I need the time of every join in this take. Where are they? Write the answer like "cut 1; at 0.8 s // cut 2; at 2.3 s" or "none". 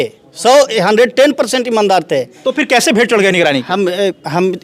none